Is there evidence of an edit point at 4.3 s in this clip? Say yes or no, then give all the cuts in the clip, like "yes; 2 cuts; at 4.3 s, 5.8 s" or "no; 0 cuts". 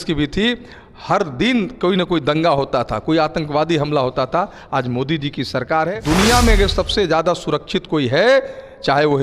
no; 1 cut; at 5.9 s